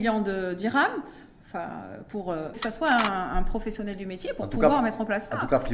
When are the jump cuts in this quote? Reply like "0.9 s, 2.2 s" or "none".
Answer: 2.6 s